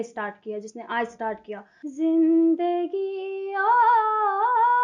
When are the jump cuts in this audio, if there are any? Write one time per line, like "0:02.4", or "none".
0:01.7